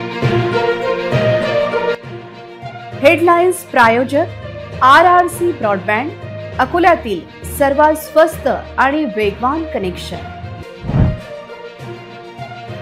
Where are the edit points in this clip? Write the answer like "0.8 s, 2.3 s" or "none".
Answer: none